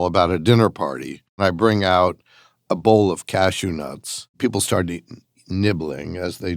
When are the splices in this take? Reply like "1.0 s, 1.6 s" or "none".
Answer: 1.4 s, 4.4 s